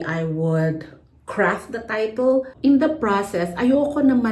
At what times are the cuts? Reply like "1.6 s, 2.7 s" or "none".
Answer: 2.5 s